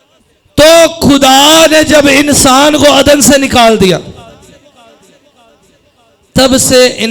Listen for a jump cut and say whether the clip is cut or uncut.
uncut